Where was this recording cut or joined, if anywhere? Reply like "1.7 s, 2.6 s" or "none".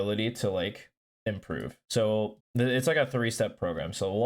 1.8 s, 2.4 s